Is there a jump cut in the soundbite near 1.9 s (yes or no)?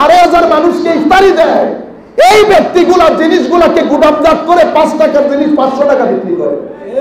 no